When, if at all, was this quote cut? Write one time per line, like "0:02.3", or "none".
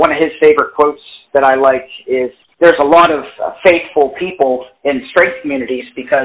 0:02.4